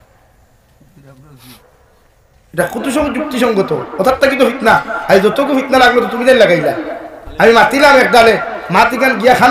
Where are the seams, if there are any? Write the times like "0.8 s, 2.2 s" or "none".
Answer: 1.5 s